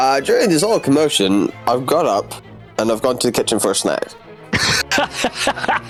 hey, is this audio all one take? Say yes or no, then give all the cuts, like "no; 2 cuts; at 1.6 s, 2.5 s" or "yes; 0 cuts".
yes; 0 cuts